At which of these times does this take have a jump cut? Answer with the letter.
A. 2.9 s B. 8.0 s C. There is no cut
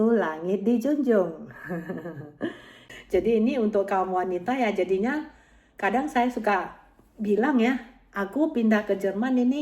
A